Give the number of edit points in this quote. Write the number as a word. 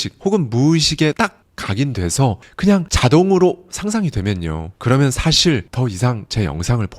two